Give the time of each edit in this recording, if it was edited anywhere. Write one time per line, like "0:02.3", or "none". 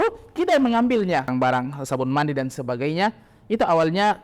0:01.3